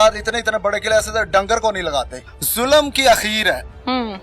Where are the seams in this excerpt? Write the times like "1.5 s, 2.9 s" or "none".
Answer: 2.2 s

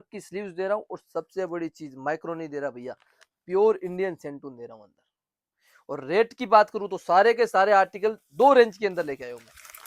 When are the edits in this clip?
none

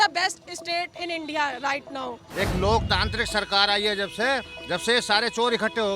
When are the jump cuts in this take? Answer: 2.2 s

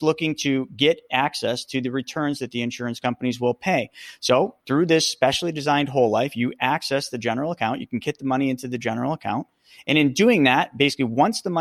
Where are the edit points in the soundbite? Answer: 4.6 s

